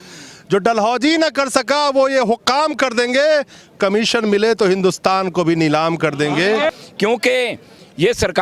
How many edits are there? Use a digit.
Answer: 1